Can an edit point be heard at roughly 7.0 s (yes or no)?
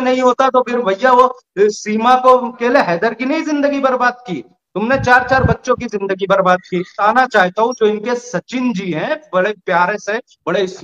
yes